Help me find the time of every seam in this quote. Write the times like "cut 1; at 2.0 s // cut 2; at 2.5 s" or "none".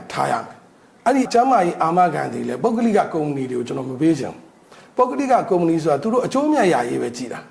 cut 1; at 1.3 s